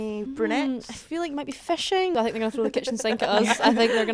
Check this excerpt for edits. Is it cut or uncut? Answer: cut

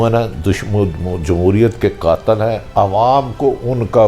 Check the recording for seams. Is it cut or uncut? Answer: uncut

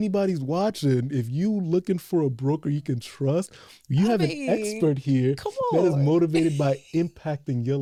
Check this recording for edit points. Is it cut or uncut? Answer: uncut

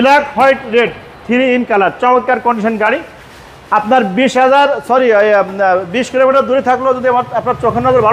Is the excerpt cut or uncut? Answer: uncut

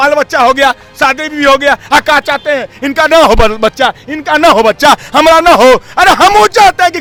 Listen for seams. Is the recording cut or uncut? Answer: uncut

